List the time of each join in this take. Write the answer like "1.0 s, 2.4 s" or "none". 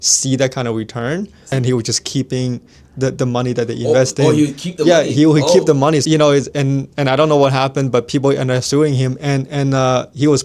1.4 s, 6.0 s